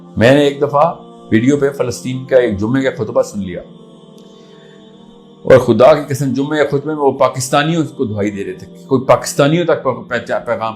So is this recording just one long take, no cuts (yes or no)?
yes